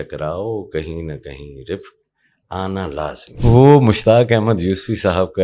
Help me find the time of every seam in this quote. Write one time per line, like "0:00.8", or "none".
0:03.4